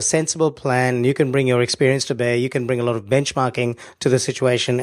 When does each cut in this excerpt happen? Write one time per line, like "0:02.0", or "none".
0:03.8

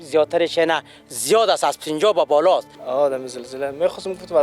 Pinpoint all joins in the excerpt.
0:02.8

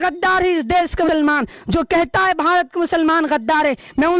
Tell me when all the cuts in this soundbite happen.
0:01.1

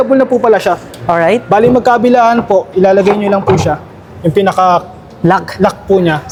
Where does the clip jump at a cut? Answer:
none

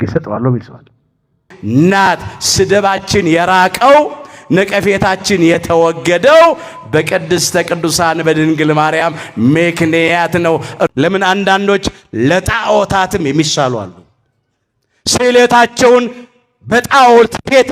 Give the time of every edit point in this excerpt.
0:01.5
0:10.9

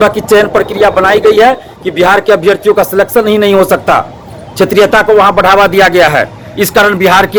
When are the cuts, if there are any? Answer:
none

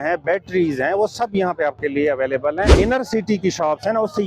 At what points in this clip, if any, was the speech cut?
0:02.7

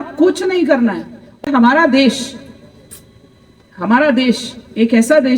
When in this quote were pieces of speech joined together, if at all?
0:01.4

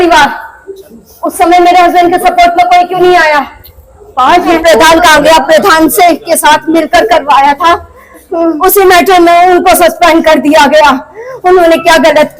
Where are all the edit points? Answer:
0:04.6
0:08.6

